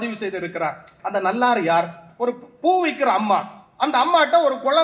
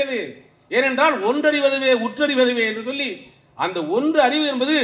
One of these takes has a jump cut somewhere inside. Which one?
first; 2 cuts; at 0.9 s, 2.0 s

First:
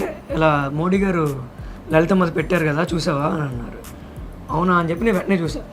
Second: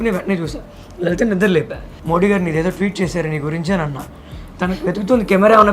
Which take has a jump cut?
second; 2 cuts; at 1.9 s, 4.4 s

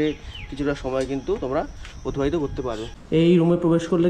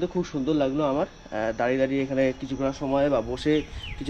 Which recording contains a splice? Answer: first; 1 cut; at 2.9 s

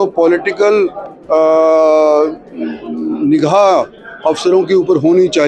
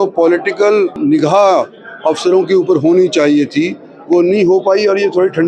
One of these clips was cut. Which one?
second; 1 cut; at 1.0 s

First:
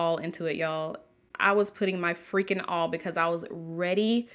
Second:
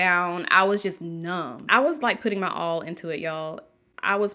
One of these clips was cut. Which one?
second; 1 cut; at 1.6 s

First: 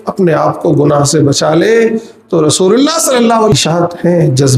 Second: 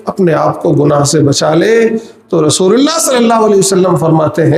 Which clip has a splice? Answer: first; 1 cut; at 3.5 s

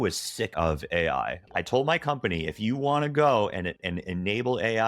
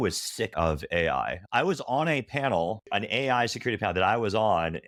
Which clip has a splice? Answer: first; 1 cut; at 1.4 s

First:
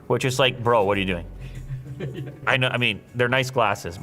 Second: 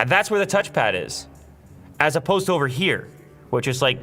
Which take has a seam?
first; 1 cut; at 2.4 s

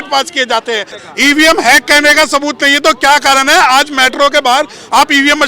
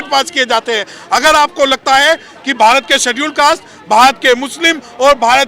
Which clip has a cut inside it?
first; 1 cut; at 0.9 s

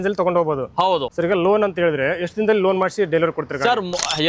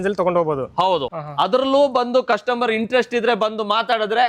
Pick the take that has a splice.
second; 1 cut; at 1.1 s

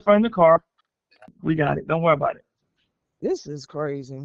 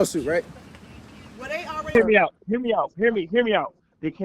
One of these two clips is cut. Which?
second; 1 cut; at 1.9 s

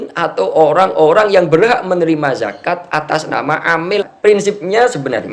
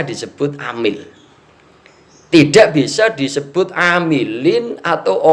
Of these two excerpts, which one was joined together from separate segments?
first; 1 cut; at 4.1 s

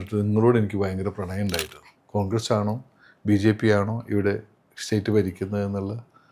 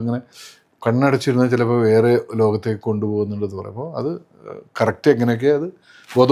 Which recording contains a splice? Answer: first; 1 cut; at 1.8 s

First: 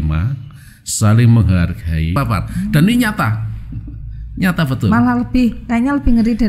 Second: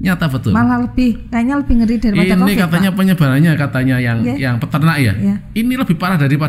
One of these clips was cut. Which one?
first; 1 cut; at 2.2 s

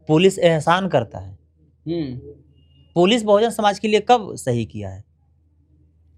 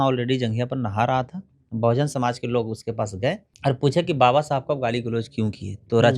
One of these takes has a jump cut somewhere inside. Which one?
second; 1 cut; at 3.5 s

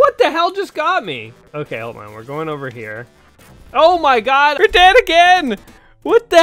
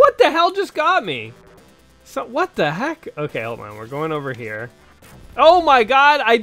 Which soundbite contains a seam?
first; 2 cuts; at 1.4 s, 4.5 s

